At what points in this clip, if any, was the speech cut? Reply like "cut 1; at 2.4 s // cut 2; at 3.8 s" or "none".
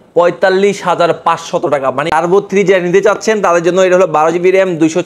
cut 1; at 2.1 s